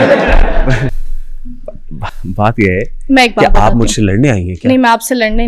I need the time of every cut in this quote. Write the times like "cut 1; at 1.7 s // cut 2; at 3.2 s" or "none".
none

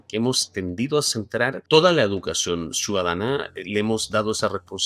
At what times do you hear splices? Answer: cut 1; at 1.6 s

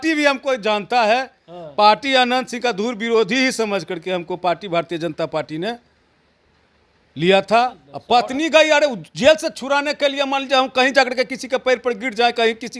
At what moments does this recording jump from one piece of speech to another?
cut 1; at 7.9 s

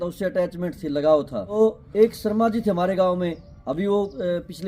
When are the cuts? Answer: cut 1; at 1.5 s

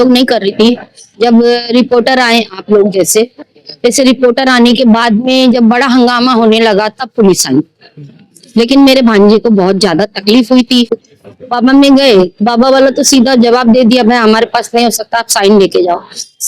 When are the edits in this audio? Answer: cut 1; at 10.9 s

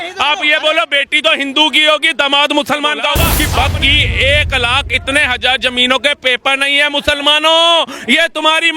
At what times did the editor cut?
cut 1; at 3.3 s

